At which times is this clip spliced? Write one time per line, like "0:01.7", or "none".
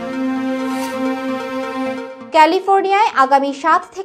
0:02.2